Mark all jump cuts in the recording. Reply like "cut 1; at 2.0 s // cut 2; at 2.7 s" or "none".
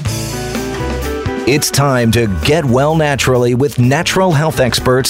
cut 1; at 1.0 s